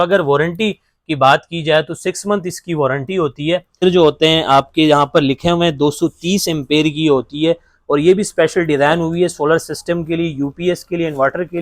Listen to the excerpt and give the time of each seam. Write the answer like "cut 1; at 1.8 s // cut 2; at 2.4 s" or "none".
cut 1; at 3.8 s